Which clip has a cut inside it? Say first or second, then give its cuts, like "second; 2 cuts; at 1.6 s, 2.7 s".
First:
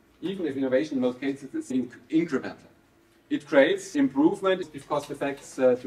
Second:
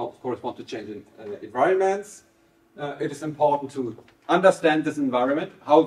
first; 3 cuts; at 1.7 s, 3.9 s, 4.7 s